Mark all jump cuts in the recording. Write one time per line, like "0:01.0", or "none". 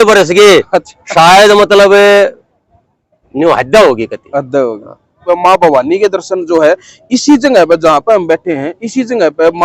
0:05.2